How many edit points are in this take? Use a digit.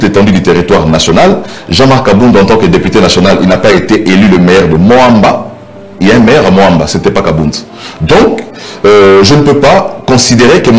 0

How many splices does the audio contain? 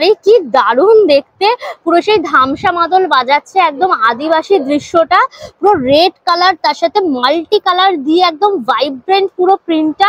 0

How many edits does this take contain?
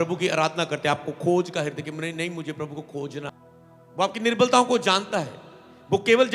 1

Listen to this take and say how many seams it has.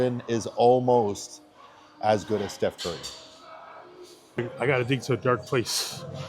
1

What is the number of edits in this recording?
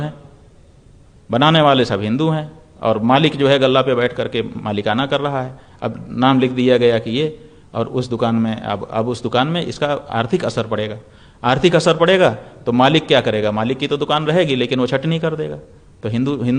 0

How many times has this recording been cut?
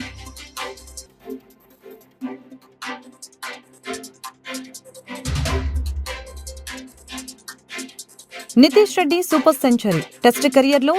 3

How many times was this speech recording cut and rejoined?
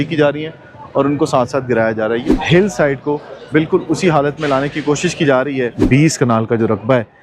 2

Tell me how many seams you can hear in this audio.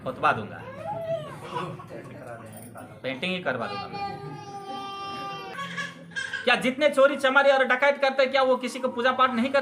1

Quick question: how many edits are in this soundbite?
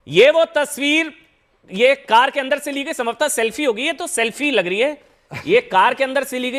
0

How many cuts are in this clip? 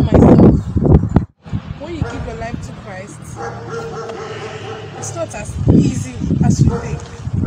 1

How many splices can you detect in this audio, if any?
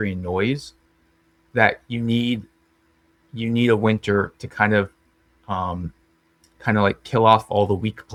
0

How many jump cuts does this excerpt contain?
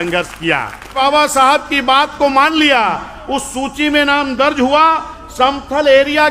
1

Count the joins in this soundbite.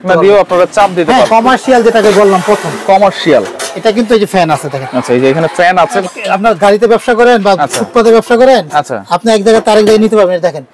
2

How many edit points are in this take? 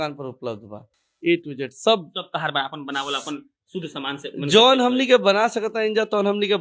0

